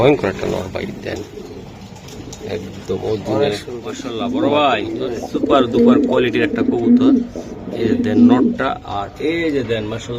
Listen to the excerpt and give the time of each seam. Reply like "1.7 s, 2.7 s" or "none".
4.1 s